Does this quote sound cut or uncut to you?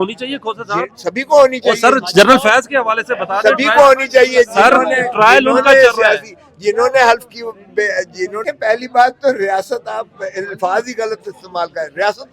cut